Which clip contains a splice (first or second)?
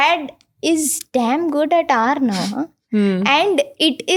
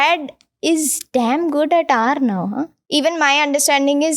second